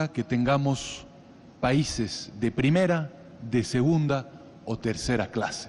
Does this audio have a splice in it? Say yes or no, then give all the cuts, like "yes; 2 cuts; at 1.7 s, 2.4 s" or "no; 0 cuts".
yes; 1 cut; at 4.4 s